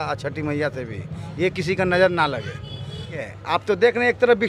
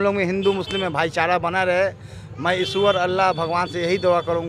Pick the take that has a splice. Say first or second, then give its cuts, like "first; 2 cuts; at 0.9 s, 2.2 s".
first; 1 cut; at 3.2 s